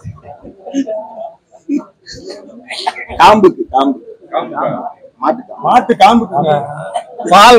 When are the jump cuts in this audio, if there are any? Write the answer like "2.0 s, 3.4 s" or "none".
none